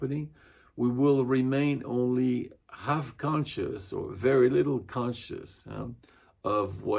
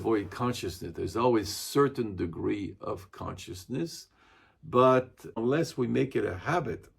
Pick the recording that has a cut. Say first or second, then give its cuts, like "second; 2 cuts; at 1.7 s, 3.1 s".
second; 1 cut; at 5.4 s